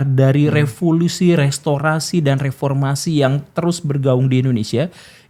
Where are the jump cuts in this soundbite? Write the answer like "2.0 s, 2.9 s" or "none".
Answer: none